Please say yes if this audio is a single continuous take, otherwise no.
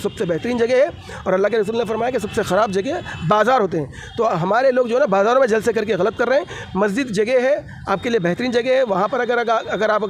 yes